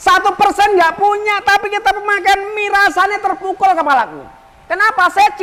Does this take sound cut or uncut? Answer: uncut